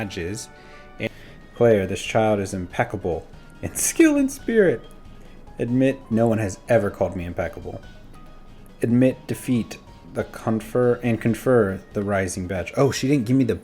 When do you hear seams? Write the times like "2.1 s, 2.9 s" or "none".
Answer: 1.1 s